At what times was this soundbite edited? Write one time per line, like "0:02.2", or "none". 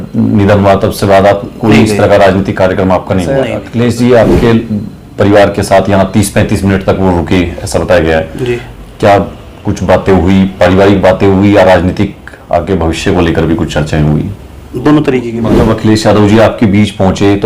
0:03.6
0:15.4

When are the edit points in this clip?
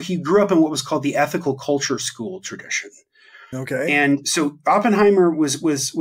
none

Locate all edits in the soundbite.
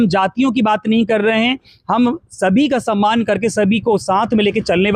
none

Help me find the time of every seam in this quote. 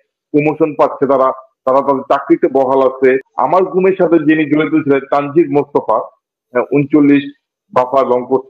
0:03.3

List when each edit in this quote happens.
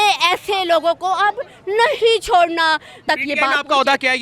0:03.0

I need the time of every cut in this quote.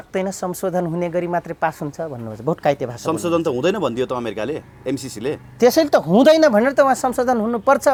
none

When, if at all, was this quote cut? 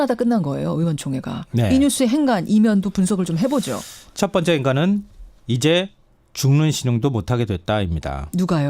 0:06.6

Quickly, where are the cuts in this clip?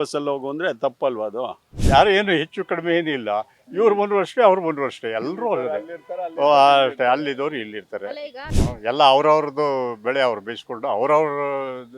0:01.7
0:08.4

